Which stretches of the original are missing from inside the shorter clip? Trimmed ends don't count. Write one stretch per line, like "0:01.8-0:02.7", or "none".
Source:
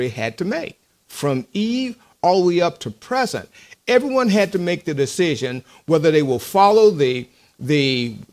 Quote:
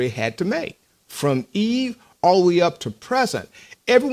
none